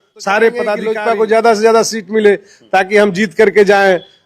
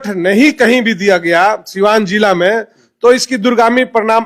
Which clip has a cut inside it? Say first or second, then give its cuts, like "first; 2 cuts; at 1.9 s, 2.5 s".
first; 1 cut; at 0.9 s